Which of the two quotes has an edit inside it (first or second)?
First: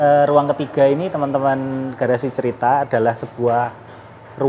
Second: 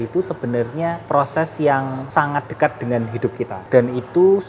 second